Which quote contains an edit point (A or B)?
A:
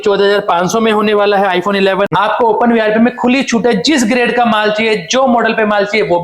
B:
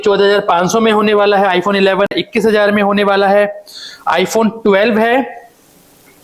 A